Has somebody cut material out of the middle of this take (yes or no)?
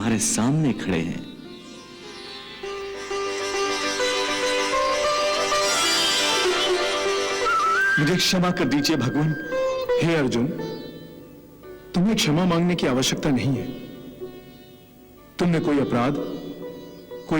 yes